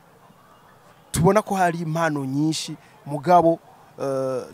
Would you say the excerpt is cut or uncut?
uncut